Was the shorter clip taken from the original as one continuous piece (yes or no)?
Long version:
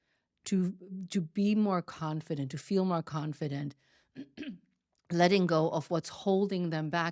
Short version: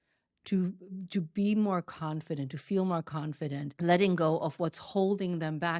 no